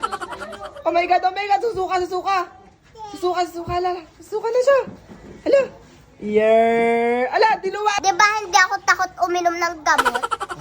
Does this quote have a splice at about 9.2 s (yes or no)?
no